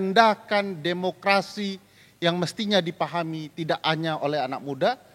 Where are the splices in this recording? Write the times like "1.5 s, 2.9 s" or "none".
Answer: none